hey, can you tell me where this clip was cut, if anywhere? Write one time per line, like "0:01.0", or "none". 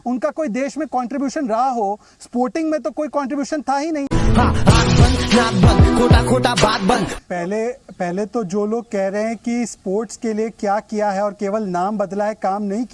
0:07.2